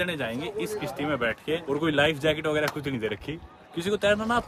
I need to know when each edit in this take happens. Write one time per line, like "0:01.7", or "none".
none